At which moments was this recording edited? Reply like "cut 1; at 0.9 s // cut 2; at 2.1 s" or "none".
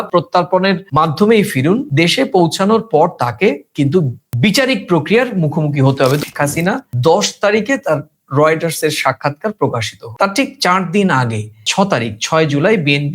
cut 1; at 6.2 s